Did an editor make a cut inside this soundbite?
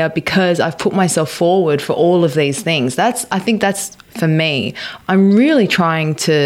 yes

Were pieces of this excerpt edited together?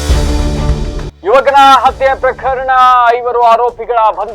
yes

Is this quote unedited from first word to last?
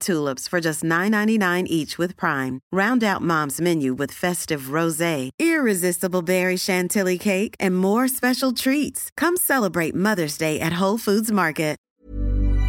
no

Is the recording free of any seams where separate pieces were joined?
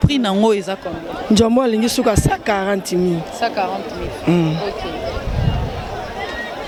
yes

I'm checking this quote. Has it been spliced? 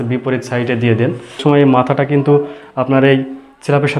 yes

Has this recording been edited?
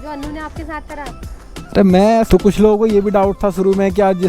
yes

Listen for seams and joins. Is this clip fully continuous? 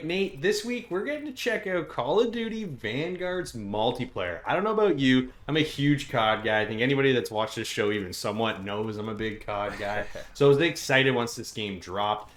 yes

